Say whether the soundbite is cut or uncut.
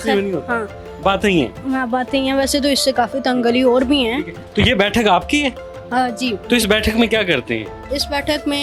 uncut